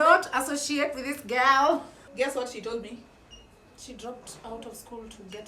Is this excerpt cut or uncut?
cut